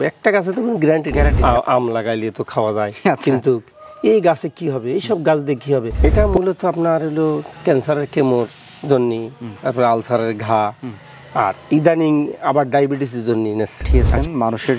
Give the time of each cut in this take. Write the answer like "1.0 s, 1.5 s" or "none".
1.3 s, 5.9 s, 13.8 s